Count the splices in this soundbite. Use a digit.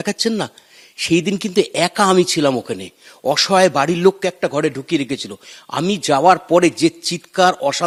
0